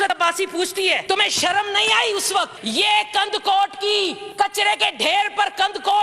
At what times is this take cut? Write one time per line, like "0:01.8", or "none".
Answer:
0:01.0
0:02.6
0:04.2